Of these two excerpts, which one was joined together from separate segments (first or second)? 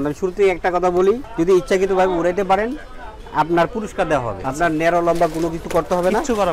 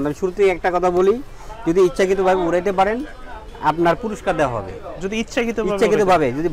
first